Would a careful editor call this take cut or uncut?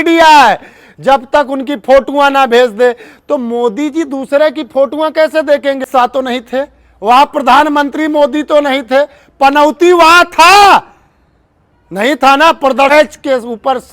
cut